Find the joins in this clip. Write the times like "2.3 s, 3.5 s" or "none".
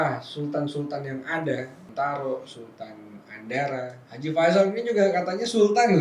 1.8 s, 4.0 s